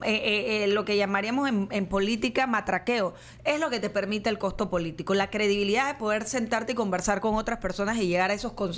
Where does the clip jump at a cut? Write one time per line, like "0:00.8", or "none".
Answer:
none